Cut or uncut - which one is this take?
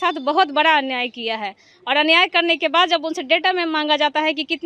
uncut